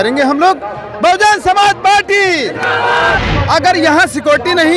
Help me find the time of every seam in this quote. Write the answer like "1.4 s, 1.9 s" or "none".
3.2 s